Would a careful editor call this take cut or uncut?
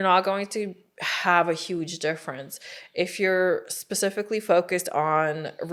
uncut